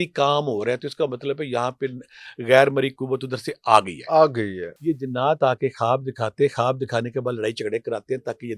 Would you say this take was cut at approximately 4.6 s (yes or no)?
yes